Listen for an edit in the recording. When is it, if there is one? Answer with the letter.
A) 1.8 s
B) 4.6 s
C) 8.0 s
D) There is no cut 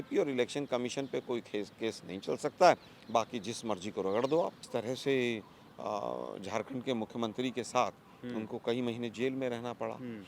B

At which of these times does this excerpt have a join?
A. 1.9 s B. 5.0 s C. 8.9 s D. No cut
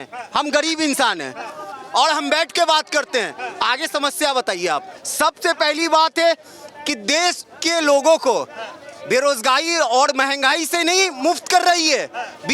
B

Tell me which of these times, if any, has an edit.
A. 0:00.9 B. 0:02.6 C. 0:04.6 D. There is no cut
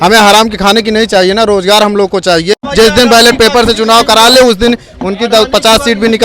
B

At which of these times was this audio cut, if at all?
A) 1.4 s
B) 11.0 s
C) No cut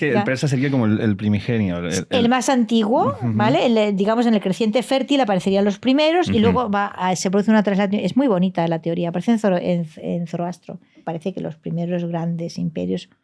B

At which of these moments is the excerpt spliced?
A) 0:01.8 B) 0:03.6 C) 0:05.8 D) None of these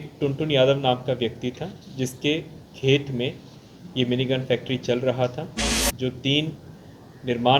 C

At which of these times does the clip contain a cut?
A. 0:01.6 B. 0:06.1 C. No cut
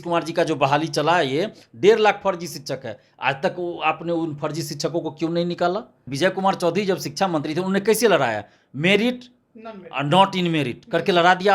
B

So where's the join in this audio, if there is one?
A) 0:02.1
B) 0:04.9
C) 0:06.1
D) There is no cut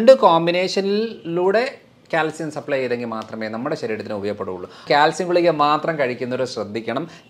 B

